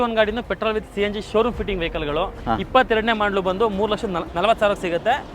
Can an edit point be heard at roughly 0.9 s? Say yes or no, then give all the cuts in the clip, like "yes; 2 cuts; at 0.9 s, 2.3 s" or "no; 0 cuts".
no; 2 cuts; at 2.4 s, 4.3 s